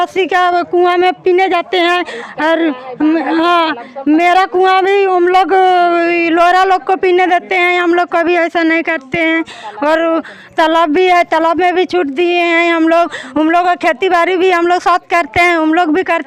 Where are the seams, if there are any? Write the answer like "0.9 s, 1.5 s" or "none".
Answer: none

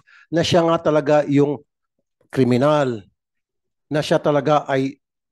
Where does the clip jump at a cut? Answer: none

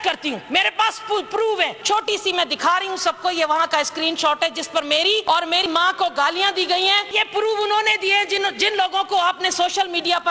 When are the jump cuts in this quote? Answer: 1.8 s, 5.2 s, 7.1 s

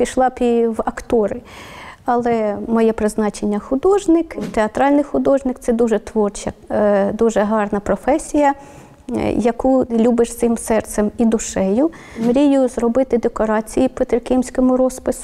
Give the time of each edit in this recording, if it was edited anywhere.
4.3 s, 9.9 s, 12.1 s

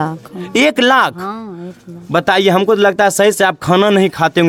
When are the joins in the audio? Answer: none

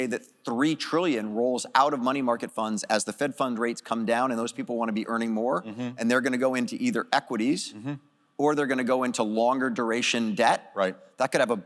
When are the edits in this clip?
none

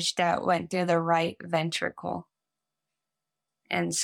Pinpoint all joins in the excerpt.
none

